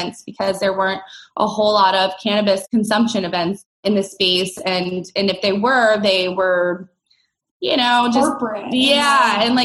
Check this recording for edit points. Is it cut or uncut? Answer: cut